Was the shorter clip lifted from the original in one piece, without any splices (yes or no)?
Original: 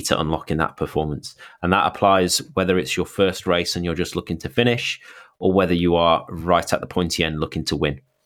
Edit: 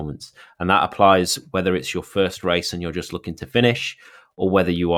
yes